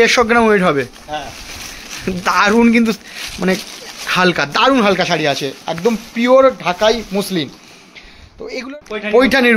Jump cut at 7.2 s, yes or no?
no